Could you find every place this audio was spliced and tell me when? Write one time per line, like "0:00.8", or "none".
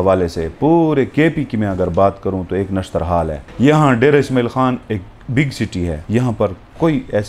0:06.0